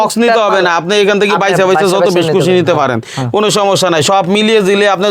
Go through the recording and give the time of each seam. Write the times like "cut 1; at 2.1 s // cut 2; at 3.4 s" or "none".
none